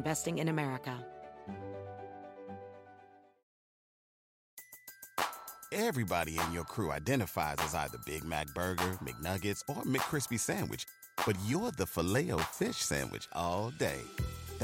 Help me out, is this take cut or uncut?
cut